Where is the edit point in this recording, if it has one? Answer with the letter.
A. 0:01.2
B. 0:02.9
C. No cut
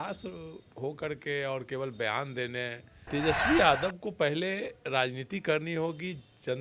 B